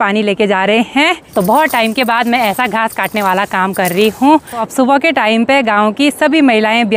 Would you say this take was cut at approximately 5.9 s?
no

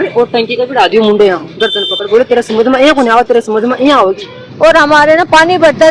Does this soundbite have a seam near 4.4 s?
yes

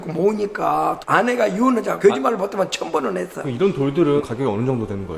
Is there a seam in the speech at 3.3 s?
yes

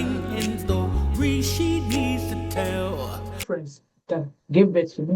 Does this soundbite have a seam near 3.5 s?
yes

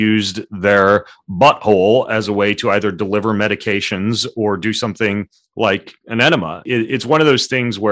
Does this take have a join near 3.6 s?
no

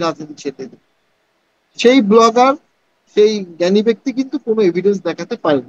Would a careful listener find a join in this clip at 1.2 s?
no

